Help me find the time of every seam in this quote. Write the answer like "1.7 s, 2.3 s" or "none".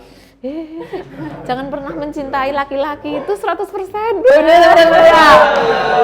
none